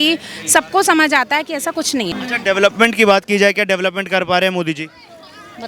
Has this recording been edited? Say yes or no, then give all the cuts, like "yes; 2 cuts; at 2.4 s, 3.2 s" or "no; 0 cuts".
yes; 1 cut; at 2.1 s